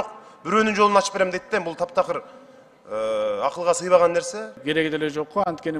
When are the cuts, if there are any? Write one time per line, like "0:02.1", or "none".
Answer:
0:04.6

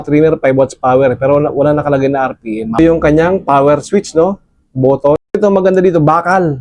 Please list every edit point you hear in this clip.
0:02.8
0:05.4

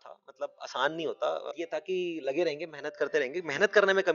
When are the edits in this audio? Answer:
0:01.5

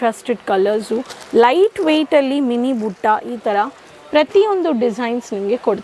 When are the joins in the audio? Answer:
none

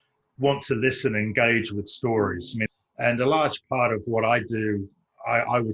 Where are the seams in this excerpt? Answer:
0:02.6

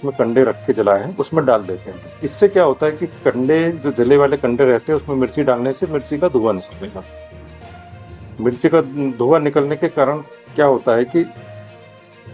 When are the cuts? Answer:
none

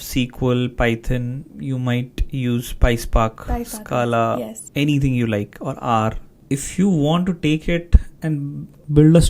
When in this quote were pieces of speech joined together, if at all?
0:04.6
0:06.3
0:08.3

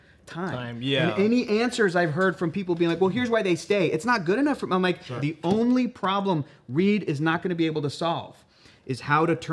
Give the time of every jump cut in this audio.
0:05.2

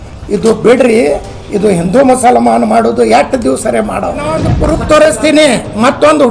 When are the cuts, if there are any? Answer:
0:04.5

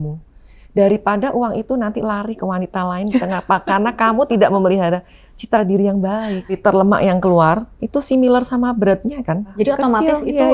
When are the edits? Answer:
0:06.6
0:09.5

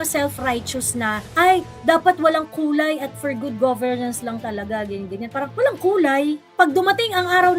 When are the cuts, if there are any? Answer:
0:05.5

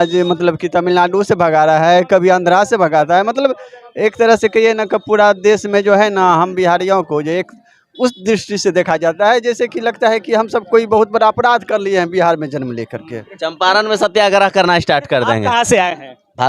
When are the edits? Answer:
0:13.1

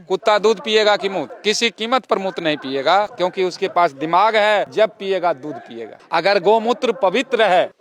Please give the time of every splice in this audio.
none

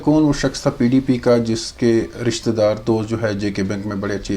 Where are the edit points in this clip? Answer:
none

